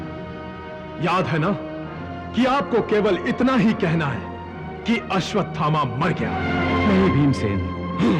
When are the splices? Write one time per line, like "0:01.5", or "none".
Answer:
0:06.4